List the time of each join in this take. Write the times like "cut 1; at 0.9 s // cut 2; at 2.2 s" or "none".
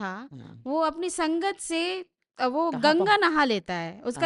none